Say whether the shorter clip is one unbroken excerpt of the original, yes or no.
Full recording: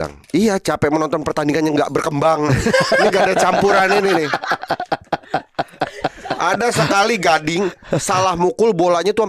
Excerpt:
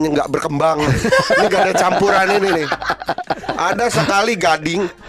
no